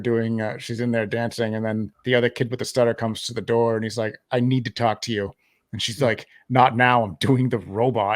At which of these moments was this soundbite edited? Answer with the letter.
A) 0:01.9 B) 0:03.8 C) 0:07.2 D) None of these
A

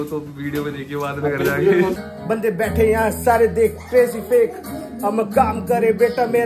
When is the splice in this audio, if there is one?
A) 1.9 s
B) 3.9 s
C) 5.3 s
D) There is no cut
A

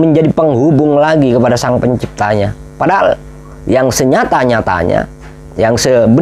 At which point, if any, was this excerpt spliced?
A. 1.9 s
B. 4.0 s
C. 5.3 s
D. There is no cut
D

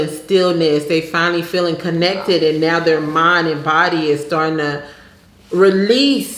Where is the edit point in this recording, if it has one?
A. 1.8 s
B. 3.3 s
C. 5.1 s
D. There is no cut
D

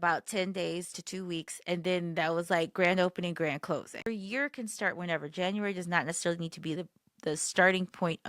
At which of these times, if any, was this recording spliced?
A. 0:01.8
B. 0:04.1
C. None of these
B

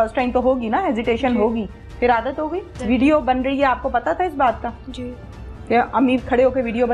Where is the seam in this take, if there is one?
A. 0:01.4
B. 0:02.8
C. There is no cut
B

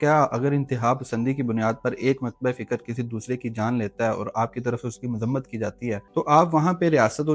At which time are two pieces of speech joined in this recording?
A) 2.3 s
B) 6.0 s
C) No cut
B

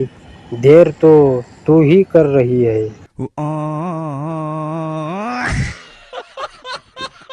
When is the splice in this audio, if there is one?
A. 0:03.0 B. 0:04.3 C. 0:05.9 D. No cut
D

